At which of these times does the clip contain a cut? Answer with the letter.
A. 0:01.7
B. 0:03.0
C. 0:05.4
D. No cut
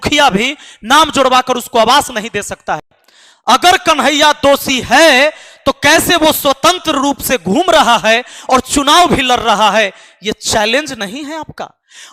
B